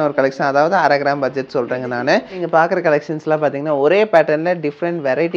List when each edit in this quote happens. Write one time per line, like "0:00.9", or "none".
0:02.4